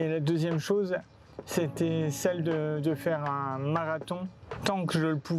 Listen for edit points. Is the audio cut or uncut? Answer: cut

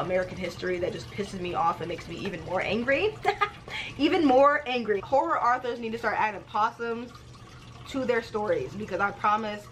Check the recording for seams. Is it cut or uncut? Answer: cut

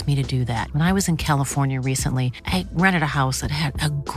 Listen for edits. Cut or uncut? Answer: uncut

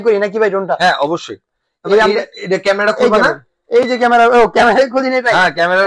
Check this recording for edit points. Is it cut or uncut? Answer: uncut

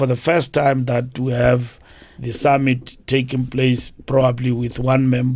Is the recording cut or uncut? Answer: uncut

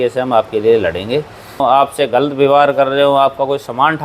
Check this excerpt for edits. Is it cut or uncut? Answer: cut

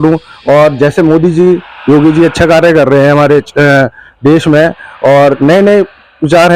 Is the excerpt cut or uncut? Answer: uncut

